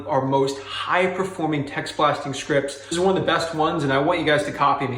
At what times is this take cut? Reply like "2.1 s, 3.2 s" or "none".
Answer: 2.9 s